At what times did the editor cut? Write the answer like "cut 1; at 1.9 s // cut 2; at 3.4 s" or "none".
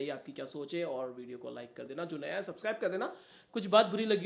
none

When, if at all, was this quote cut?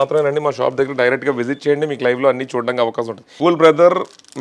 cut 1; at 3.2 s

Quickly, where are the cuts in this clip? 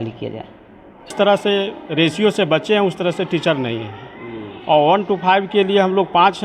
cut 1; at 1.1 s

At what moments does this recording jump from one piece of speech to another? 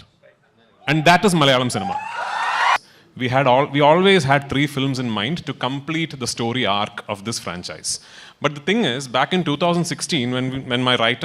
cut 1; at 2.8 s

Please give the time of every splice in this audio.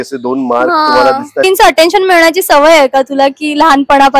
cut 1; at 1.5 s

